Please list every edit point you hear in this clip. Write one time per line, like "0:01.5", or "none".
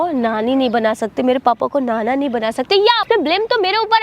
0:03.0